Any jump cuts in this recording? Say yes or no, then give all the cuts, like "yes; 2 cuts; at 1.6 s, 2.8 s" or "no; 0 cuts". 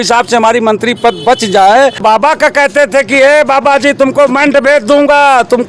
yes; 1 cut; at 2.0 s